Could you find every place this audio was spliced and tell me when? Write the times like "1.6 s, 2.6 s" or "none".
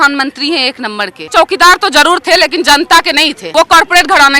1.2 s, 3.4 s

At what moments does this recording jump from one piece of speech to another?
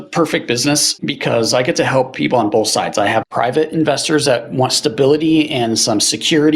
1.0 s, 3.2 s

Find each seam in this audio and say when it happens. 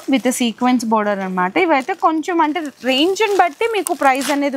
none

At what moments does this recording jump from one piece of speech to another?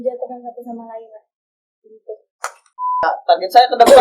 3.0 s

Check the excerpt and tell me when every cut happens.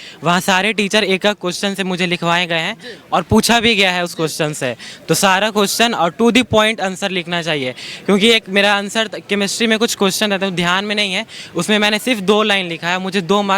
none

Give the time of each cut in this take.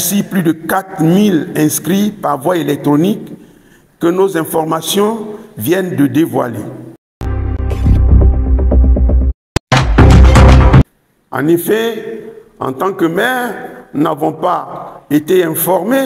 none

